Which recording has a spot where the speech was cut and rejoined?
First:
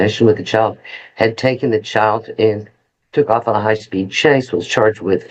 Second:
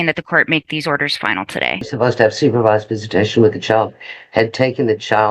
second; 1 cut; at 1.9 s

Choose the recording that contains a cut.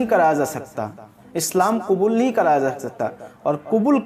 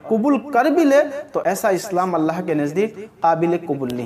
second; 1 cut; at 1.4 s

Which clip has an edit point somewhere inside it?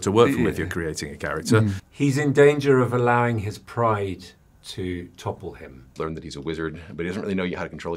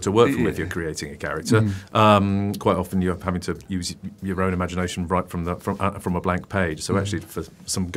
first; 2 cuts; at 1.8 s, 5.9 s

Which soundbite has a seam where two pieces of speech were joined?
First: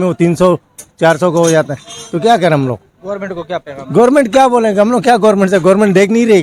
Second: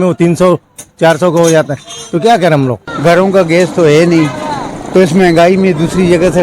second; 1 cut; at 2.9 s

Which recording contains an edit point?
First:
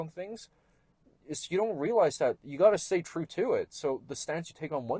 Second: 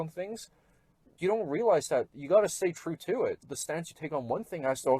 second; 2 cuts; at 1.1 s, 3.5 s

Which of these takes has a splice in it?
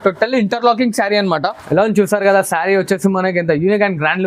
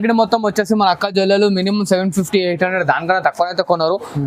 first; 1 cut; at 1.6 s

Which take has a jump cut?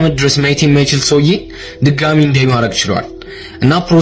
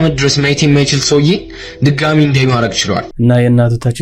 second; 1 cut; at 3.1 s

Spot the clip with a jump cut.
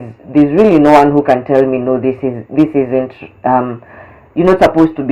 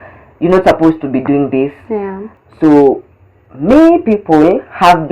second; 1 cut; at 2.3 s

